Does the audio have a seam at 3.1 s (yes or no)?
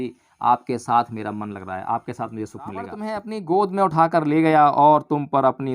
yes